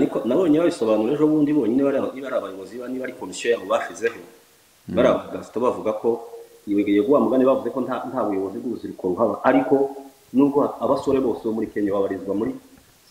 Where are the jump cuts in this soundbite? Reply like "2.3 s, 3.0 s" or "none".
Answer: none